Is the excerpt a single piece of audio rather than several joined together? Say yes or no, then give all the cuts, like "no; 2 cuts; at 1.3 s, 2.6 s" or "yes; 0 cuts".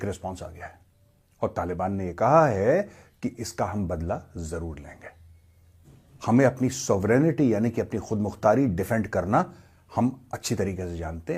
yes; 0 cuts